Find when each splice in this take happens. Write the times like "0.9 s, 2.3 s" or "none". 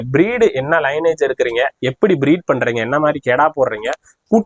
none

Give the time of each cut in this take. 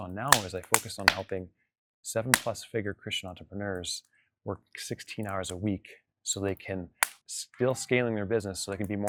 none

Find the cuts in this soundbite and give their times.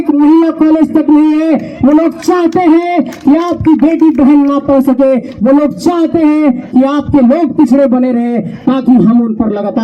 none

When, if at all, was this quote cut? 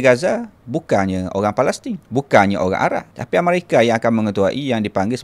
1.9 s, 3.1 s

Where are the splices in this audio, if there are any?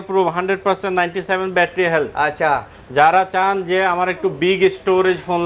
none

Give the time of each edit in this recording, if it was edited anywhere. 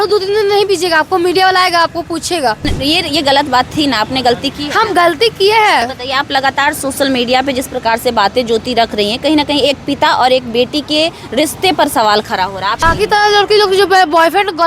2.7 s, 6.0 s, 12.8 s

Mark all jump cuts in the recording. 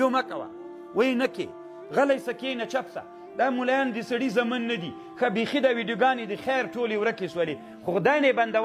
none

